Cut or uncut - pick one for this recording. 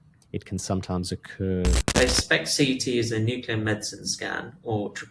cut